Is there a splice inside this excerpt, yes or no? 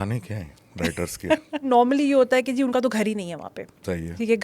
yes